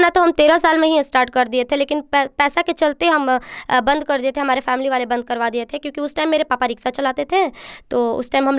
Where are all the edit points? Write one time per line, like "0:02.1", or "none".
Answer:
none

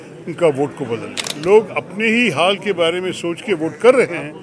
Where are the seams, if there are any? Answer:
0:01.3

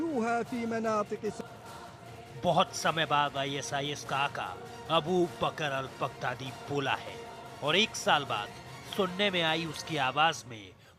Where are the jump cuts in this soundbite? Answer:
0:01.1

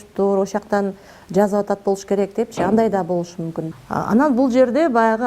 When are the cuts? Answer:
0:03.6

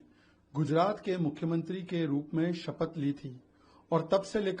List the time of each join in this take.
none

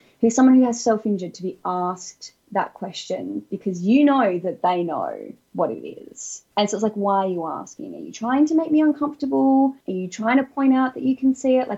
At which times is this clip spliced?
0:09.9

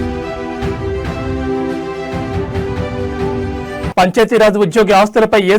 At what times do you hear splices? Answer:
0:03.9

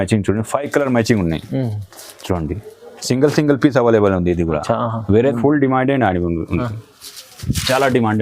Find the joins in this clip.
0:05.3

